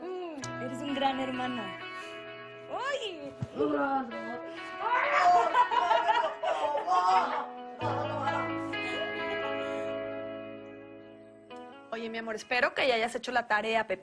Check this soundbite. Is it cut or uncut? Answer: uncut